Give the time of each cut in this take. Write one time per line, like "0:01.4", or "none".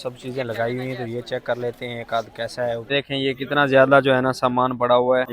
0:02.8